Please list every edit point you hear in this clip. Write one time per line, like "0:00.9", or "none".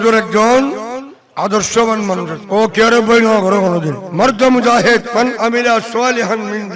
0:02.4
0:04.0
0:05.1